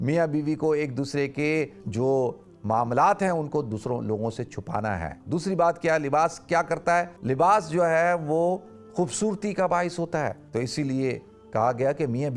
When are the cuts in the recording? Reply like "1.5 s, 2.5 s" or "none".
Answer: 1.8 s, 5.2 s, 7.2 s, 10.4 s